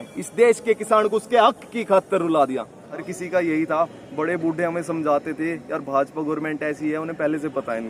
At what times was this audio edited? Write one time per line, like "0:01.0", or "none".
0:02.9